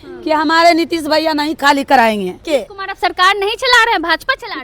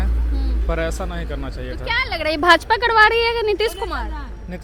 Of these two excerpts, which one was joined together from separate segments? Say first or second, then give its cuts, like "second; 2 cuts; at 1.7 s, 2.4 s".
first; 1 cut; at 2.3 s